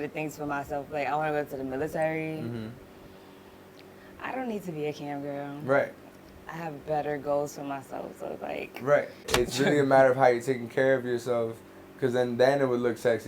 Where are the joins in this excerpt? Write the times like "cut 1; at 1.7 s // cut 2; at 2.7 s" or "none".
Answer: cut 1; at 9.2 s